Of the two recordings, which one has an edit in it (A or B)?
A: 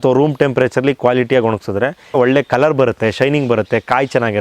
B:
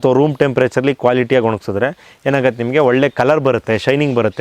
A